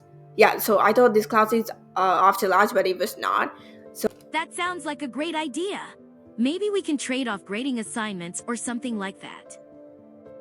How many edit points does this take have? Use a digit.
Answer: 2